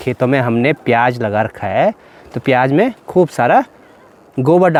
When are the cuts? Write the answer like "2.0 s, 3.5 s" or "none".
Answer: none

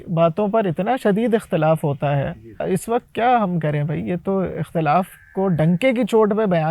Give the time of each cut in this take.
2.6 s

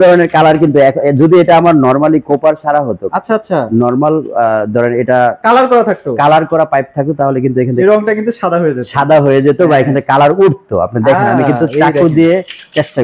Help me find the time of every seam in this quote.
none

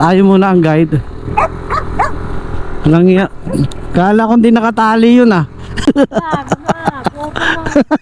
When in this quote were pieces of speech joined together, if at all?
5.6 s

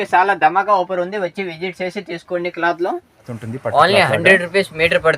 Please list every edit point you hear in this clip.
3.4 s

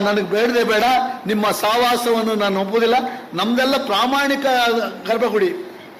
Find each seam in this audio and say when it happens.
none

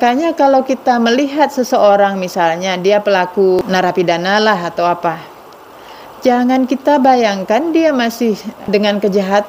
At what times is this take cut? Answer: 3.6 s, 8.6 s

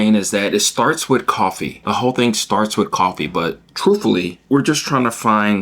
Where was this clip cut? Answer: 1.7 s, 4.4 s

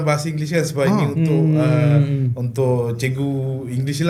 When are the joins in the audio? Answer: none

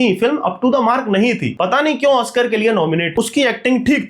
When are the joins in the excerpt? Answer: 1.5 s, 3.1 s

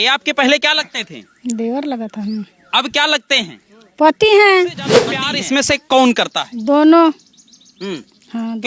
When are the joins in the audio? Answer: 5.2 s

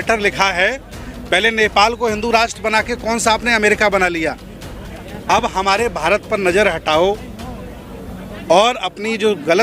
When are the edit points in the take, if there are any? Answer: none

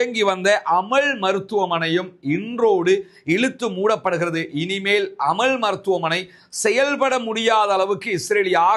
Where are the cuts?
none

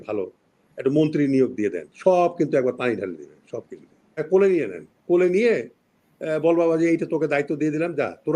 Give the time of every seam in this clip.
4.2 s

